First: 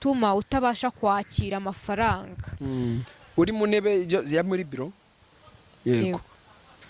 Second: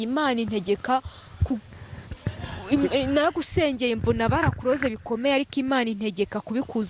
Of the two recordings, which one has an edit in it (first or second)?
first